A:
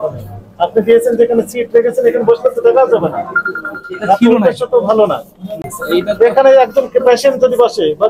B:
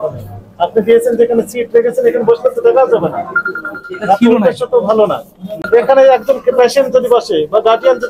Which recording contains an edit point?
B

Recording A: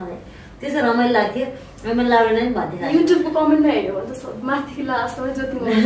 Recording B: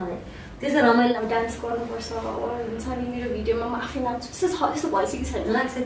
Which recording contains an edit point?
B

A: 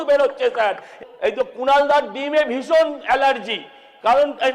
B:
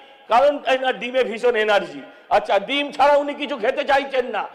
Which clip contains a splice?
A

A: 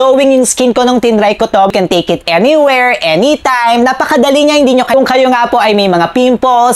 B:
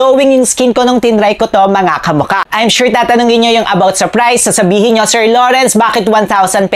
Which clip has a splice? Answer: A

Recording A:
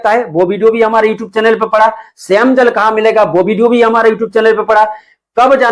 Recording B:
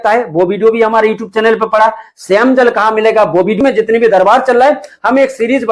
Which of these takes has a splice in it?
B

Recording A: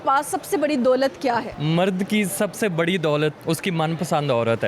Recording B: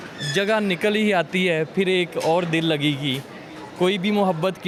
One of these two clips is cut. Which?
A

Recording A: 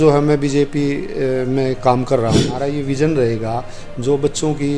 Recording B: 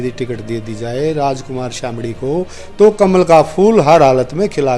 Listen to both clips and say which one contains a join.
A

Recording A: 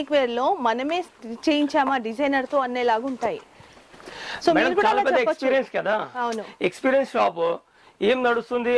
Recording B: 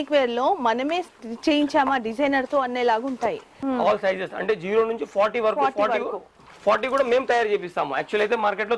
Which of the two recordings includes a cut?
B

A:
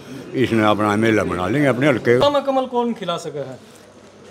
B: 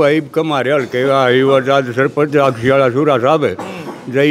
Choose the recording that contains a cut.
A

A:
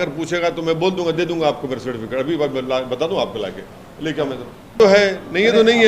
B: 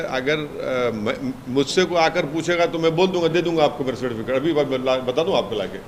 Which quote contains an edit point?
A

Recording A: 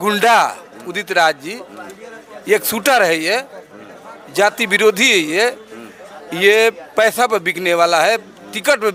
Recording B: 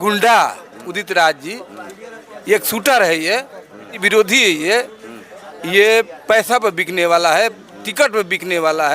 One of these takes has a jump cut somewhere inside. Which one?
B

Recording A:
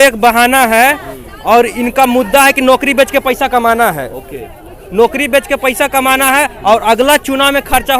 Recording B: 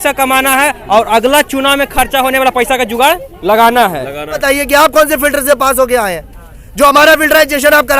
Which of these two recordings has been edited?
B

